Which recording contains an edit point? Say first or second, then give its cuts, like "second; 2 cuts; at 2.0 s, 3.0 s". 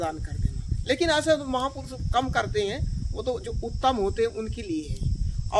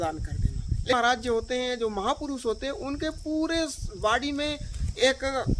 second; 1 cut; at 0.9 s